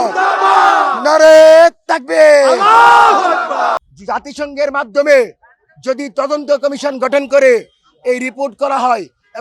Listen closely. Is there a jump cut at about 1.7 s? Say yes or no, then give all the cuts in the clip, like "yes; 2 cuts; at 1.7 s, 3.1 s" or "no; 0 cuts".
no; 1 cut; at 3.8 s